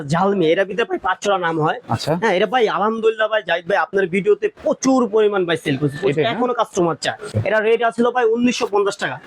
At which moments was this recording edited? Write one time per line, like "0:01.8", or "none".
0:07.3